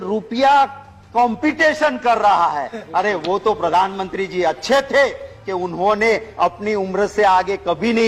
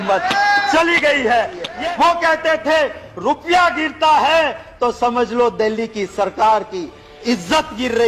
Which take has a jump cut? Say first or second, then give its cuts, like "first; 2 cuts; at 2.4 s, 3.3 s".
second; 1 cut; at 1.7 s